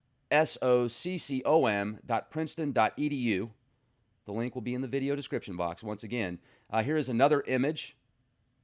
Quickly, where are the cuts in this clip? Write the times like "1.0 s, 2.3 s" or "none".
5.3 s